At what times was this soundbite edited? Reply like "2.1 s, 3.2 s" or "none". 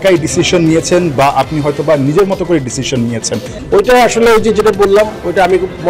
3.5 s